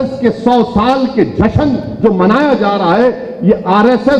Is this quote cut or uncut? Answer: uncut